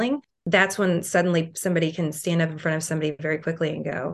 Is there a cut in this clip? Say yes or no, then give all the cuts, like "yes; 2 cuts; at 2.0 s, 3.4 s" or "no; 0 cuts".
no; 0 cuts